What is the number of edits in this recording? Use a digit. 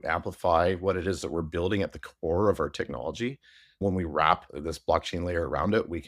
2